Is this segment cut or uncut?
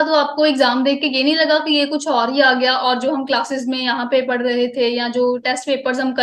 uncut